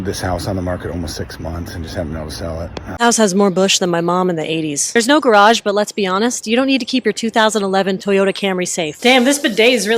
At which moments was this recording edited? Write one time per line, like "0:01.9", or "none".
0:02.8